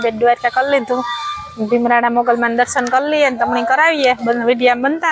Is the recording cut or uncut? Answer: uncut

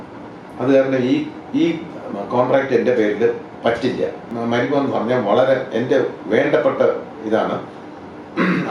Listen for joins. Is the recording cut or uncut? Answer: cut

